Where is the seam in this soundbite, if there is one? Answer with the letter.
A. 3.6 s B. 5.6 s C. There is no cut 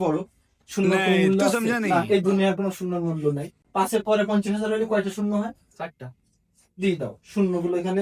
A